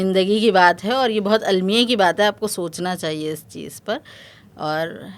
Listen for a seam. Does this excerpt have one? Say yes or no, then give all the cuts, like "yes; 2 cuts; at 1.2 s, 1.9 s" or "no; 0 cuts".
no; 0 cuts